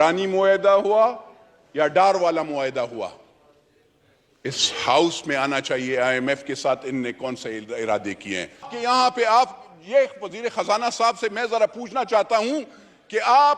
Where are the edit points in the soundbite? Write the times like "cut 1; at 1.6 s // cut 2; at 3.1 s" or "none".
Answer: cut 1; at 8.7 s